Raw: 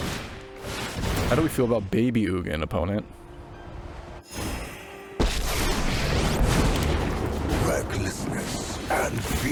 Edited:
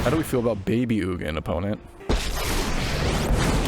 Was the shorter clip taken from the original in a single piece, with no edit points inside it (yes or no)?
no